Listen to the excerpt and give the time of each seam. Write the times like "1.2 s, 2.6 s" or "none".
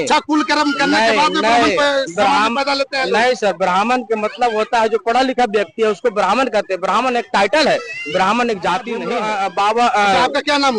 9.1 s